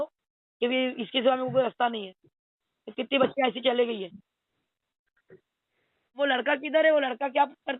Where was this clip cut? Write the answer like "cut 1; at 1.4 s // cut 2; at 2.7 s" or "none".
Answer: cut 1; at 6.2 s